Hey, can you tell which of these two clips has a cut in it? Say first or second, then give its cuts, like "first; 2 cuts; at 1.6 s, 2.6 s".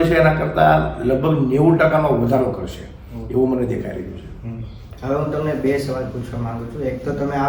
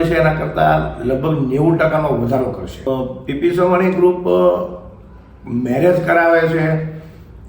second; 1 cut; at 2.9 s